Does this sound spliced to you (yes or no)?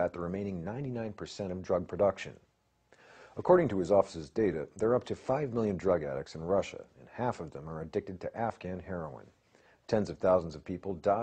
yes